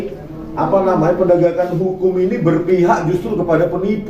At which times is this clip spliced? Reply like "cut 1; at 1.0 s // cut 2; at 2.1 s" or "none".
none